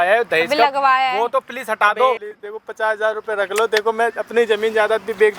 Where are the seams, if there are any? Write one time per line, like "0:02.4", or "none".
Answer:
0:02.2